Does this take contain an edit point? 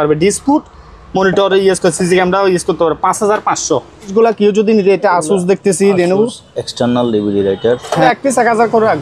yes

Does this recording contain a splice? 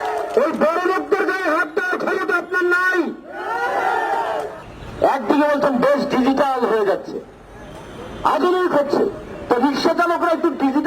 yes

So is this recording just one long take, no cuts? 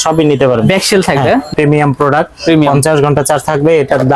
no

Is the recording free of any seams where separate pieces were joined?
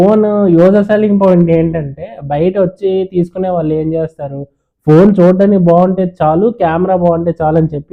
yes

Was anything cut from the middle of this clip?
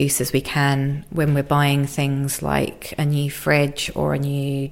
no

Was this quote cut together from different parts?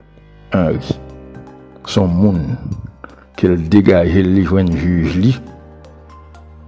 yes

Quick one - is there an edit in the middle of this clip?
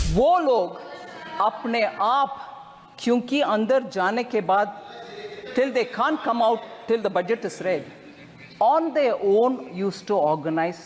no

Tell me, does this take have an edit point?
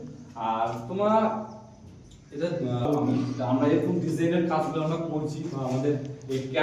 yes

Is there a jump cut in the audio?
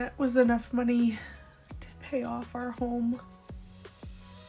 yes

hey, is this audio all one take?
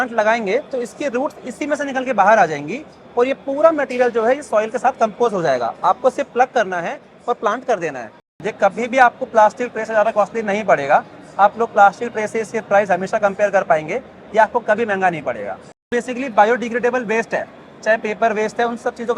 no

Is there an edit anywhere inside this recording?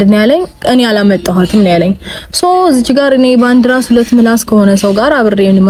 no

